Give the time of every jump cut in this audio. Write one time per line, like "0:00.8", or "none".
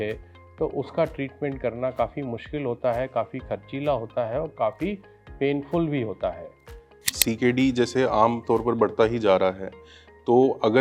0:07.1